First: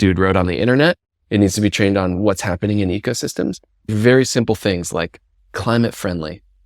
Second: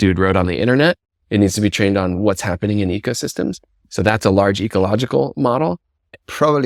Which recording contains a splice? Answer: first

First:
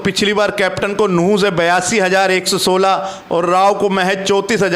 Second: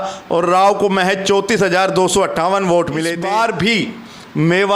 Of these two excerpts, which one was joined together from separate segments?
second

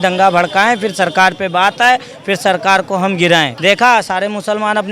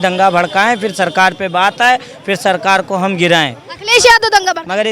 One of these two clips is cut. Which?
first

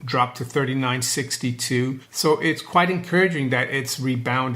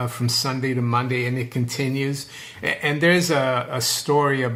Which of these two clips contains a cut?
first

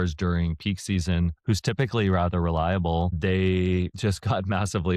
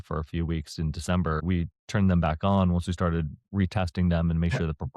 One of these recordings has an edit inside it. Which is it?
second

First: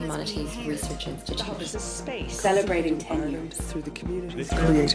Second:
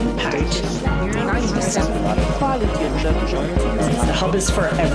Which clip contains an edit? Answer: second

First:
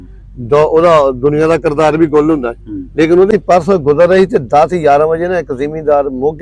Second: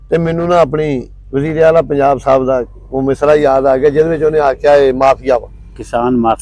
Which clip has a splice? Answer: first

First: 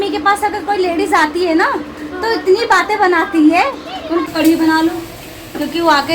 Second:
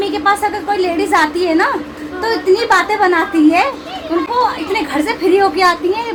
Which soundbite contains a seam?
first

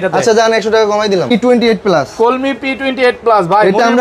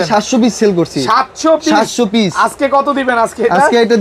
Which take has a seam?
first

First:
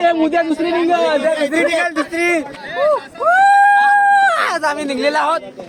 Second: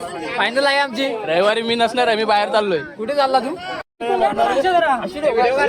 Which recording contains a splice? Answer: second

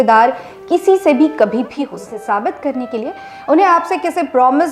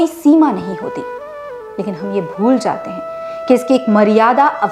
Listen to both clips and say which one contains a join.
first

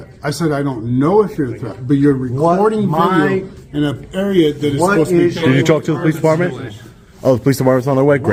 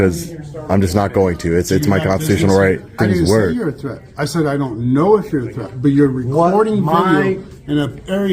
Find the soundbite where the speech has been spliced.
second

